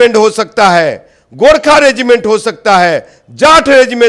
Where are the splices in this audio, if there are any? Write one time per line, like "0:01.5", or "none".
none